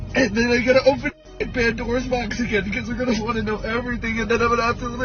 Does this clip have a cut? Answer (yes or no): no